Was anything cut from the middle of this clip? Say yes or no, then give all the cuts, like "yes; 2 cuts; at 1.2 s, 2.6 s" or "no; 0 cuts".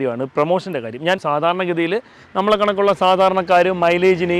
yes; 1 cut; at 1.2 s